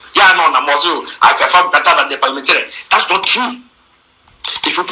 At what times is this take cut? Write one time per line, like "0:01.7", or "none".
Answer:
none